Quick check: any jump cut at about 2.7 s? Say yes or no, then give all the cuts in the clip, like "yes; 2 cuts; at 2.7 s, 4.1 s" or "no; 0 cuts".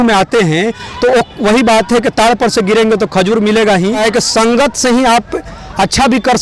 no; 1 cut; at 4.0 s